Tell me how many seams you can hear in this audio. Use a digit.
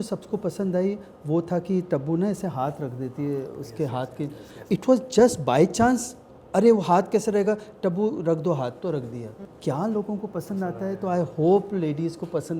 2